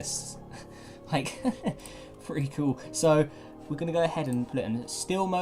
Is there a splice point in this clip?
yes; 1 cut; at 1.4 s

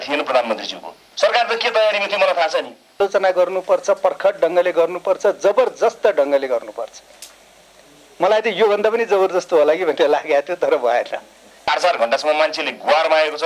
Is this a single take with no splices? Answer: no; 3 cuts; at 1.0 s, 2.9 s, 11.6 s

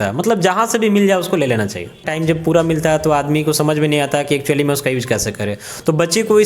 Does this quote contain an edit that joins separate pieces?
yes; 1 cut; at 2.0 s

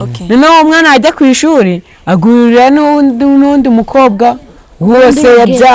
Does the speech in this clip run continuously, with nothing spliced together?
yes; 0 cuts

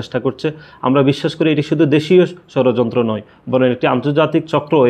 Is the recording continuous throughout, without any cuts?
yes; 0 cuts

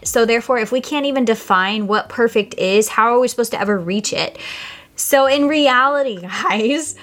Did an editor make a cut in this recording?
no; 0 cuts

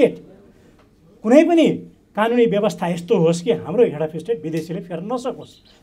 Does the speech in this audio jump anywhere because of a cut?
no; 0 cuts

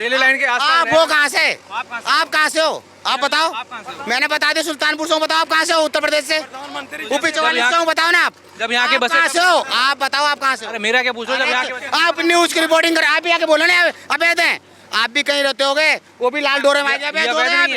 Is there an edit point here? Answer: no; 0 cuts

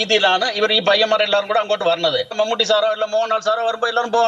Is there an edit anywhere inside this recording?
yes; 1 cut; at 2.3 s

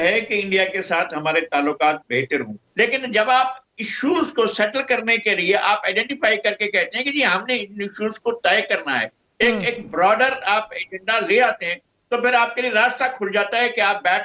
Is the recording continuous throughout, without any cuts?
yes; 0 cuts

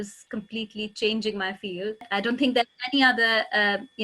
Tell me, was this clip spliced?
yes; 1 cut; at 2.1 s

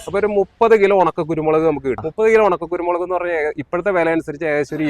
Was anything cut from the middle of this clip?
yes; 1 cut; at 2.0 s

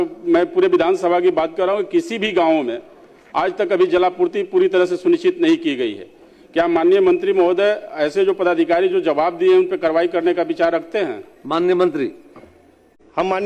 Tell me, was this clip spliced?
no; 0 cuts

